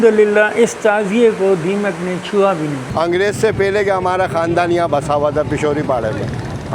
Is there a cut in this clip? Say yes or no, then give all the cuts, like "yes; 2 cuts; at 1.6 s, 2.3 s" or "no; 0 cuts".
yes; 1 cut; at 2.8 s